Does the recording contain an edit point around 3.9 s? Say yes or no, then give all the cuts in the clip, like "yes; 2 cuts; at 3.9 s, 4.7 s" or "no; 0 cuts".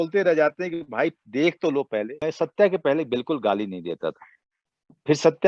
no; 1 cut; at 2.1 s